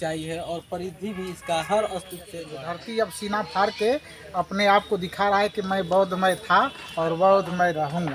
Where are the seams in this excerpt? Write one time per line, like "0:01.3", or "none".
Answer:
0:02.5